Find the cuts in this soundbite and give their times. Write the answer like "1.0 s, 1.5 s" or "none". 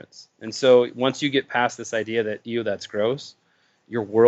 none